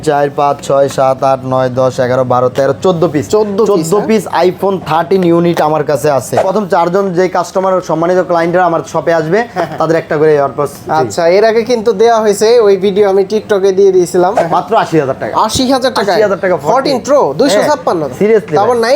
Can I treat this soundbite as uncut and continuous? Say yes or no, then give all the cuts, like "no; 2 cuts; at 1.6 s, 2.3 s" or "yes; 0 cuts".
no; 2 cuts; at 6.4 s, 14.4 s